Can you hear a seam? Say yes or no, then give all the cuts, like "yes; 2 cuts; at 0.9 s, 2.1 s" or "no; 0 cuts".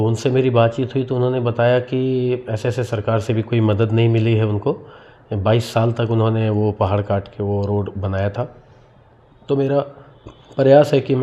no; 0 cuts